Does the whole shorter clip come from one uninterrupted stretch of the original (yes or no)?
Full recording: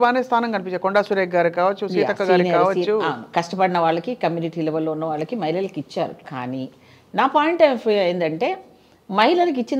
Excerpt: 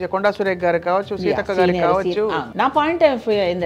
no